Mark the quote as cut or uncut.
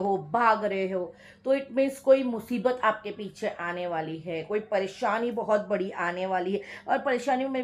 uncut